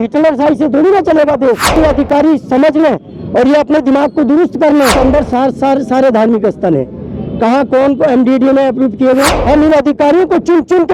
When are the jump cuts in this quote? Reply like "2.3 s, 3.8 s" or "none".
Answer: 1.8 s, 4.9 s, 9.4 s